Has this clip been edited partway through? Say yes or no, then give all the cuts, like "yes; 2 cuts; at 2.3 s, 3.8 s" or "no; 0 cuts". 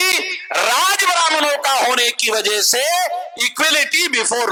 no; 0 cuts